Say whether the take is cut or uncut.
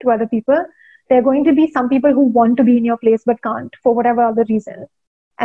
uncut